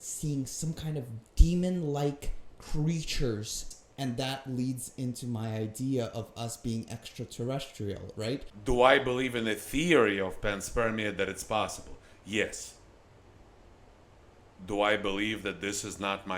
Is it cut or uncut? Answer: cut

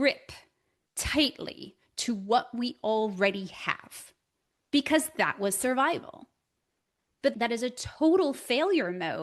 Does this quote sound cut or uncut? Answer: cut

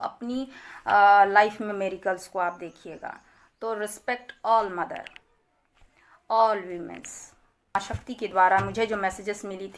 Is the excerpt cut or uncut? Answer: cut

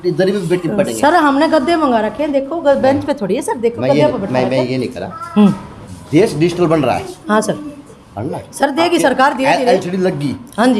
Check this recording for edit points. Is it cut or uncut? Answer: uncut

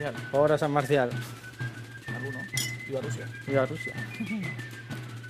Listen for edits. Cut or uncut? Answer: cut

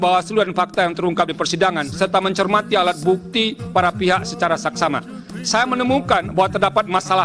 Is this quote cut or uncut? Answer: uncut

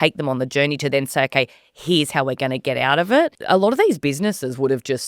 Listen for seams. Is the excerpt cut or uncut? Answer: cut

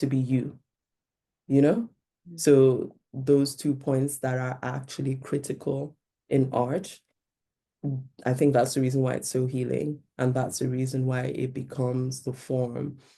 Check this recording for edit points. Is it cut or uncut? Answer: uncut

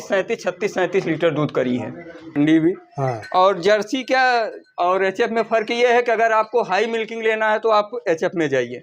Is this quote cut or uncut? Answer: cut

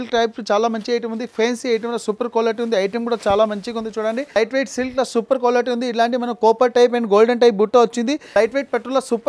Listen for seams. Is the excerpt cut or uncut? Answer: cut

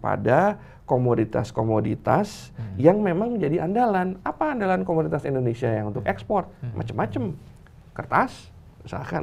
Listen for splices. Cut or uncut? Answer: uncut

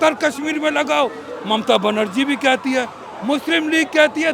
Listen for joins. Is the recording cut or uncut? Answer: uncut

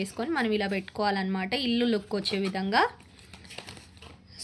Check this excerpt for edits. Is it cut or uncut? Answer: uncut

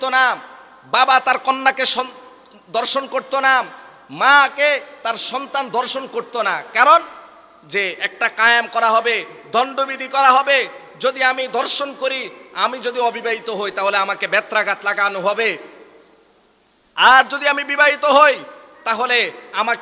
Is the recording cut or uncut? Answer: uncut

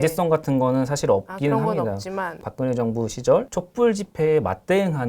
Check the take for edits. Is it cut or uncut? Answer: cut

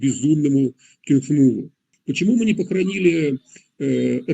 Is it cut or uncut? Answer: cut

